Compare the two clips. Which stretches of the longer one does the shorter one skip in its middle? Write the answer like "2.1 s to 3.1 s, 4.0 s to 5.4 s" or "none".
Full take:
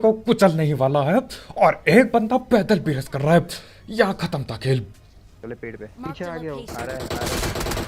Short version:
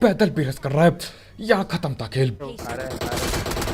5.0 s to 6.6 s

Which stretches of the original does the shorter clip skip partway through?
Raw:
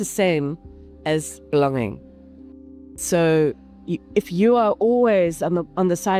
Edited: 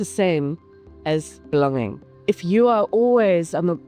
2.1 s to 3.9 s

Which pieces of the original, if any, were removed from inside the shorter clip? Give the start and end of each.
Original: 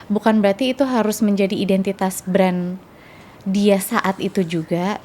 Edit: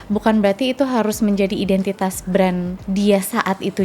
2.8 s to 3.3 s

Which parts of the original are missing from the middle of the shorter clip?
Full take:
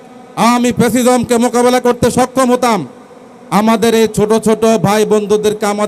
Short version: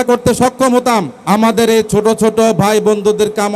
2.9 s to 3.4 s

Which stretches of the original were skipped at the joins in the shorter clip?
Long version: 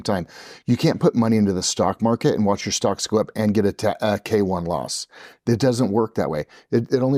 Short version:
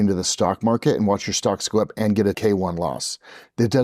3.8 s to 4.3 s

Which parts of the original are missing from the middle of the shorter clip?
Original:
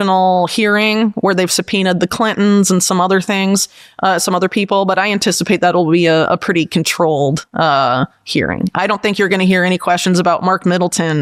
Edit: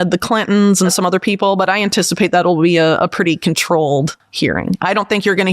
2.8 s to 4.2 s, 7.5 s to 8.1 s

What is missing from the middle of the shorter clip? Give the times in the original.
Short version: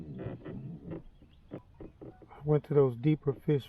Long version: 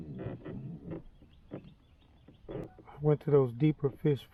2.2 s to 2.7 s

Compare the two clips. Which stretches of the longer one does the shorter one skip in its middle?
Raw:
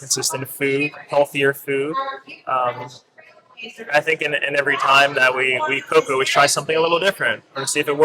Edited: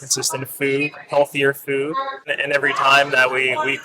2.3 s to 4.3 s

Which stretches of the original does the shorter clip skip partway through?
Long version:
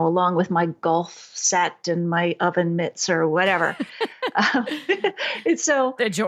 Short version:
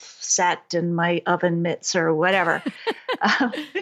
none

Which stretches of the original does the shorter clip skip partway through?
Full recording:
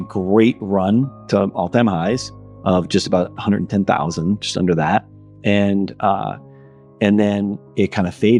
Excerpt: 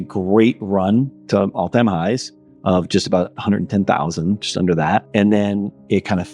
5.1 s to 6.9 s

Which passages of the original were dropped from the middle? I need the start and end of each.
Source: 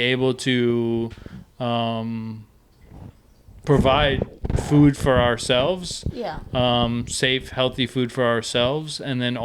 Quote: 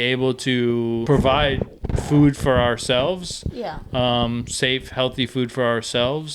1.0 s to 3.6 s

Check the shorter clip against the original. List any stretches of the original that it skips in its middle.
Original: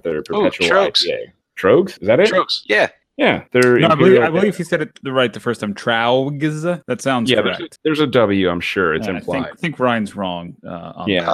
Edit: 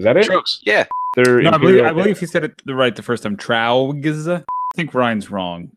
3.1 s to 3.4 s, 7.0 s to 9.4 s

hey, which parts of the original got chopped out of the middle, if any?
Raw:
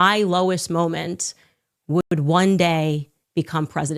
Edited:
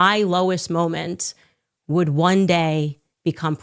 2.0 s to 2.1 s

